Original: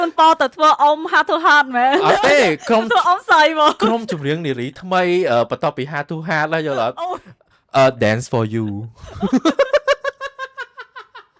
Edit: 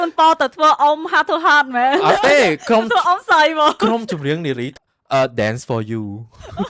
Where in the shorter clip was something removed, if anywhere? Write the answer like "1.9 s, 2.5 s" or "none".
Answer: 4.7 s